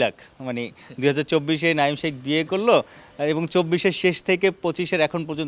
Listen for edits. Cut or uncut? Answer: uncut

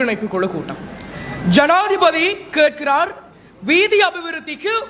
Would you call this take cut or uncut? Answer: uncut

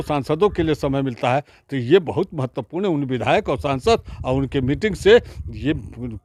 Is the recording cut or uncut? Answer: uncut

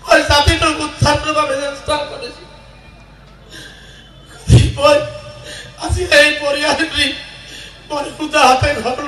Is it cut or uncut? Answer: uncut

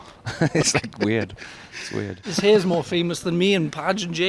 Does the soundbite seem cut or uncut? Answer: cut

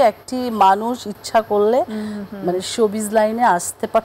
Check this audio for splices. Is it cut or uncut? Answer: uncut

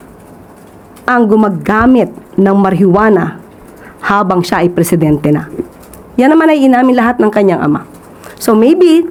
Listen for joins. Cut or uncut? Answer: uncut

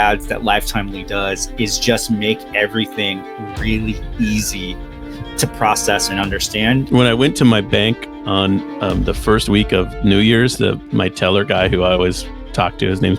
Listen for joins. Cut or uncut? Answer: cut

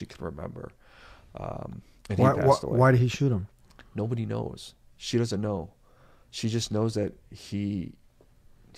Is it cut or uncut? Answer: uncut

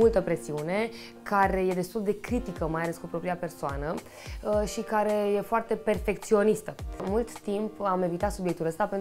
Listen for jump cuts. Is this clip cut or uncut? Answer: cut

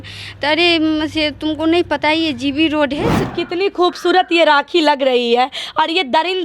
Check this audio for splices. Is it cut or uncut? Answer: cut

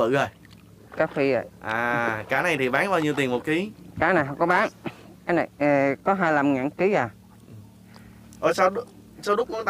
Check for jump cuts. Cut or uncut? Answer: uncut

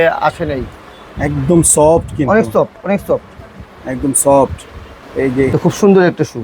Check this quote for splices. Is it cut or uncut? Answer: cut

